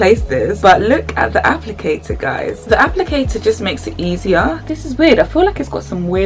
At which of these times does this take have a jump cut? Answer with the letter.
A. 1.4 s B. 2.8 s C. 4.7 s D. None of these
C